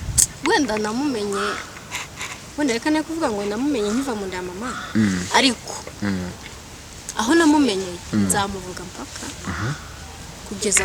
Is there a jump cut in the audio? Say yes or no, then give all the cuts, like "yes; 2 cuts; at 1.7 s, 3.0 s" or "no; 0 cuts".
no; 0 cuts